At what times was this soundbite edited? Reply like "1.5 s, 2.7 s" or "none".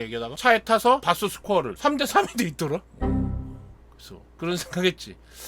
1.0 s